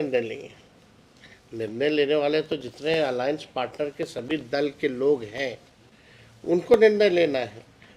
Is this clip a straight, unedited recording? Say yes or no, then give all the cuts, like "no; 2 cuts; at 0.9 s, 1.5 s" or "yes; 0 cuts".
yes; 0 cuts